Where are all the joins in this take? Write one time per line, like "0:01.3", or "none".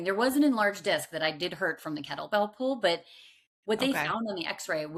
none